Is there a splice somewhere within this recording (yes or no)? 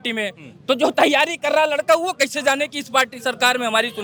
no